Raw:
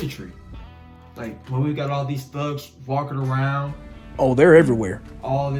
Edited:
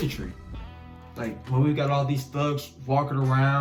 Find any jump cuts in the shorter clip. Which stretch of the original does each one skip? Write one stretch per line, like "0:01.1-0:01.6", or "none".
none